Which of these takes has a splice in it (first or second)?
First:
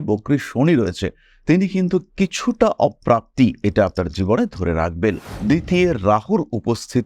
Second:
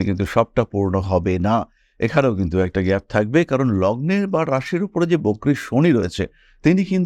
first